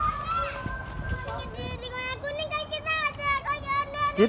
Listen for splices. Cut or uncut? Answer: cut